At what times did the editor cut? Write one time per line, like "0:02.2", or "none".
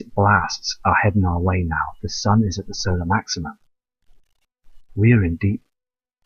0:05.3